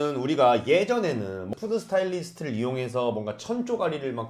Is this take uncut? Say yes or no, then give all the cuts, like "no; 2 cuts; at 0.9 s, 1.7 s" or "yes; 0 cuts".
no; 1 cut; at 1.5 s